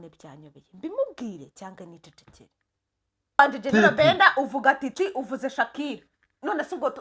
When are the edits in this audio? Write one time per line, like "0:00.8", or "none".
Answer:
0:03.4